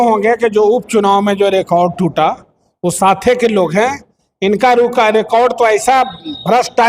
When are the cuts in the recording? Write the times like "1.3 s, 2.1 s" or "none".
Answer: none